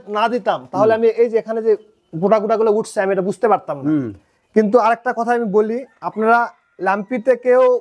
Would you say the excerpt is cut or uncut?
uncut